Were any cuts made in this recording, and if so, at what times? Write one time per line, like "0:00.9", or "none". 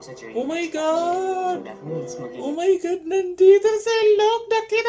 none